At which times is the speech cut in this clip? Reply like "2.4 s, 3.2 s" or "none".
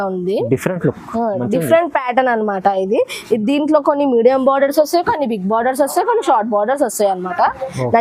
none